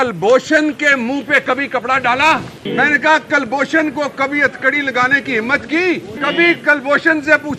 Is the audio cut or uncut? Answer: cut